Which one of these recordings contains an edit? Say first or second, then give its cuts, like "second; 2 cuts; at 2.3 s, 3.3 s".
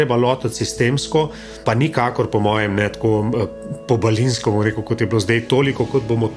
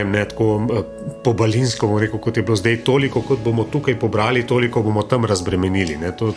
first; 1 cut; at 1.6 s